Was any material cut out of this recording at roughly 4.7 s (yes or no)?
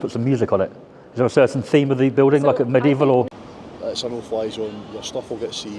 no